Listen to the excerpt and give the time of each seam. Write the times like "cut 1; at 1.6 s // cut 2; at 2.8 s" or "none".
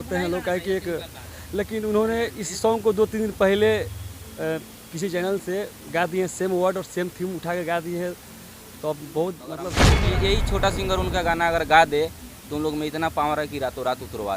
cut 1; at 10.0 s